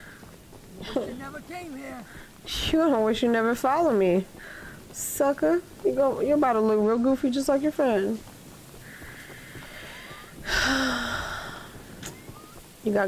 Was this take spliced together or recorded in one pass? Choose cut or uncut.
uncut